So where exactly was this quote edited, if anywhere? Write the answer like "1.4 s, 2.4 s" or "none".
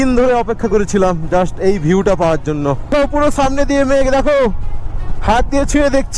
2.9 s